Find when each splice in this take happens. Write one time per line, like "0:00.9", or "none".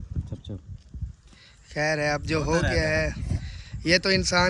none